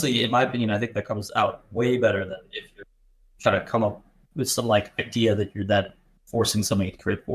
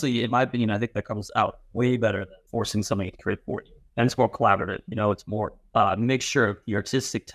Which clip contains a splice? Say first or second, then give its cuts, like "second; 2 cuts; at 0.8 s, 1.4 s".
second; 3 cuts; at 2.4 s, 3.8 s, 5.6 s